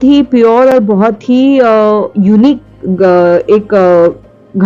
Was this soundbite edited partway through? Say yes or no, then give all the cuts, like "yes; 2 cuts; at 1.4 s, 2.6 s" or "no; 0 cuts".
no; 0 cuts